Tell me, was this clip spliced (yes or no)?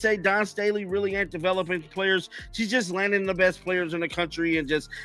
no